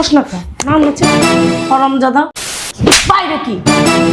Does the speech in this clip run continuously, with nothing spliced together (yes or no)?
no